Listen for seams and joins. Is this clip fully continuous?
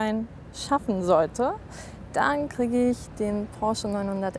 yes; 0 cuts

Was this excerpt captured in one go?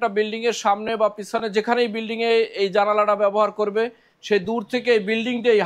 yes; 0 cuts

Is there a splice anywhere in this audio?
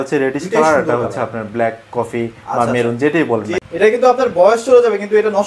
yes; 1 cut; at 3.5 s

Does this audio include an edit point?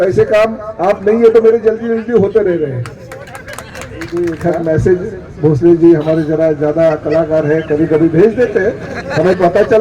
yes; 1 cut; at 4.1 s

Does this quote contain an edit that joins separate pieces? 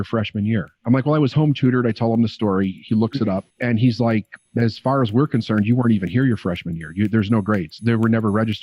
no; 0 cuts

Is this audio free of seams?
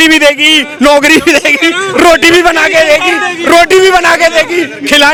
yes; 0 cuts

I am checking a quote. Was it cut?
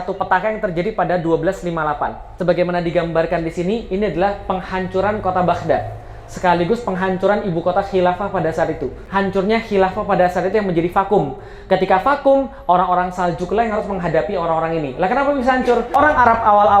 yes; 3 cuts; at 2.3 s, 9.0 s, 16.0 s

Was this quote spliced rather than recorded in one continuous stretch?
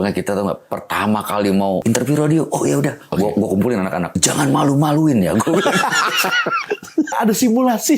yes; 3 cuts; at 1.8 s, 4.2 s, 7.1 s

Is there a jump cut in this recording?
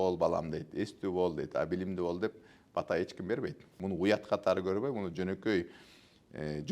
yes; 1 cut; at 3.7 s

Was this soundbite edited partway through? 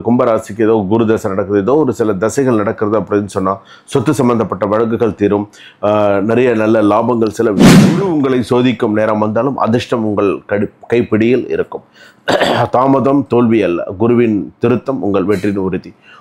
yes; 1 cut; at 7.8 s

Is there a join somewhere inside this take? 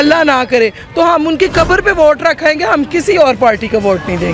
no; 0 cuts

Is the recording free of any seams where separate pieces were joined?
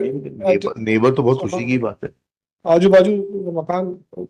yes; 0 cuts

